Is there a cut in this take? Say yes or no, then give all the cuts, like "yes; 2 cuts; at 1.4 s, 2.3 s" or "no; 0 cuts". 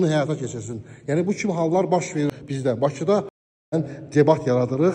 yes; 2 cuts; at 2.3 s, 3.4 s